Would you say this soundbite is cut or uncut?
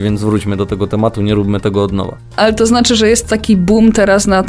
uncut